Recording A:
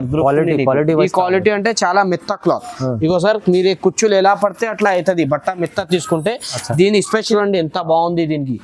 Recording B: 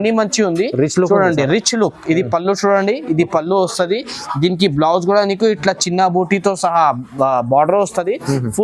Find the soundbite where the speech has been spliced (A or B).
A